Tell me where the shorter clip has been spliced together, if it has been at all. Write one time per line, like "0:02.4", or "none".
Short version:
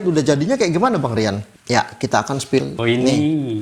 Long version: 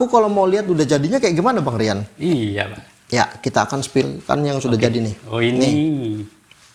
0:01.5
0:02.7